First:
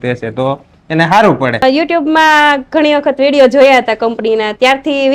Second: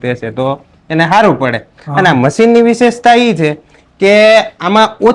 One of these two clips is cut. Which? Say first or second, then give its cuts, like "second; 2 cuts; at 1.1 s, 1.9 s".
first; 1 cut; at 1.6 s